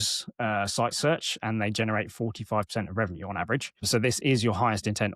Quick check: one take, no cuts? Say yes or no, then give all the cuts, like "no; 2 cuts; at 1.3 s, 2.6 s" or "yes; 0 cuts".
yes; 0 cuts